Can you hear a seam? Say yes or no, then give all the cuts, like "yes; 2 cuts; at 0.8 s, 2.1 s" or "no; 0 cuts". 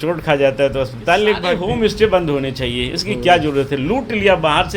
yes; 1 cut; at 1.5 s